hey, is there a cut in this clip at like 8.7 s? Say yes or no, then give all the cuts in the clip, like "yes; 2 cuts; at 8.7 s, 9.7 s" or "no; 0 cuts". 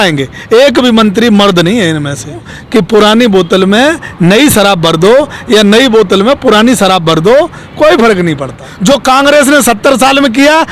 yes; 2 cuts; at 2.5 s, 8.7 s